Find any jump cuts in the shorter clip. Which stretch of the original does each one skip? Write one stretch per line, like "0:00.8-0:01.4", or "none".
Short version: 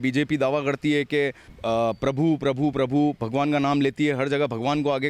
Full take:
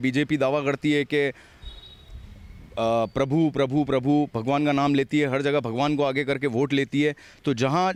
0:01.5-0:02.6